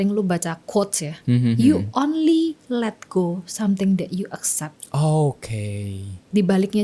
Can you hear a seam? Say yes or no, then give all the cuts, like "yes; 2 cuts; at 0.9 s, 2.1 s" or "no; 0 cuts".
no; 0 cuts